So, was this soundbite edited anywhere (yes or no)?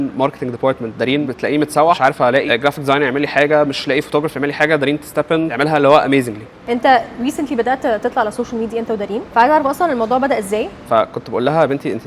yes